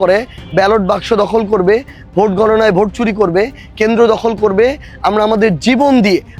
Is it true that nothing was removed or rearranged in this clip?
yes; 0 cuts

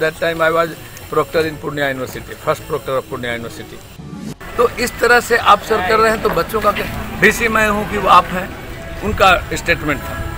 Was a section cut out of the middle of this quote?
yes; 1 cut; at 4.3 s

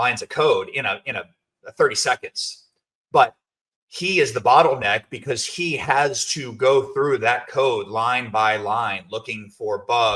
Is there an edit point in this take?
no; 0 cuts

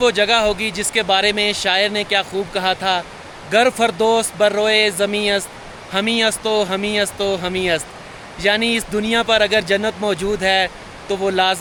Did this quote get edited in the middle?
no; 0 cuts

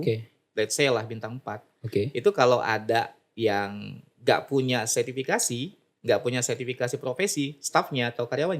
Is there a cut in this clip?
no; 0 cuts

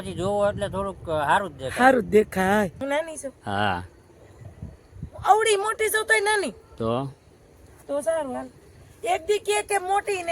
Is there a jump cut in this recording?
yes; 1 cut; at 2.8 s

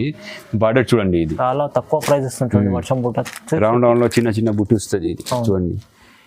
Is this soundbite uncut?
no; 1 cut; at 1.3 s

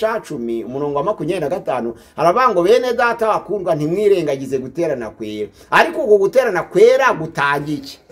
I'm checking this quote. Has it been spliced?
no; 0 cuts

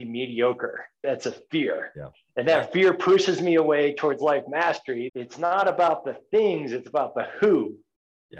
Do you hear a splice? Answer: yes; 2 cuts; at 1.0 s, 5.0 s

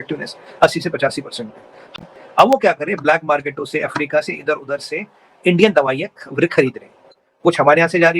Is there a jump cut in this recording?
yes; 1 cut; at 1.9 s

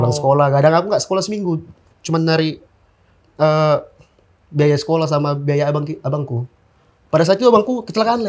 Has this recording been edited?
no; 0 cuts

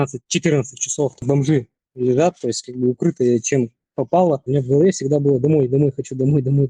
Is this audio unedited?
no; 2 cuts; at 1.2 s, 4.4 s

